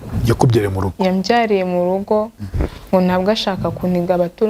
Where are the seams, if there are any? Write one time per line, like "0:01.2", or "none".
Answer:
none